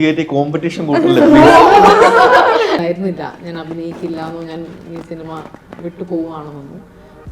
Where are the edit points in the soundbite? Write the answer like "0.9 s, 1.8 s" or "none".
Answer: 2.8 s